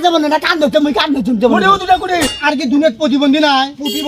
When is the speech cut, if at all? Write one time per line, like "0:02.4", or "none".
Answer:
0:02.2